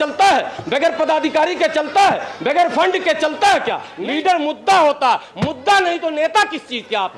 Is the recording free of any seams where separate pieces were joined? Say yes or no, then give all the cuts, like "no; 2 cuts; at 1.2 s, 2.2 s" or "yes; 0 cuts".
no; 1 cut; at 3.9 s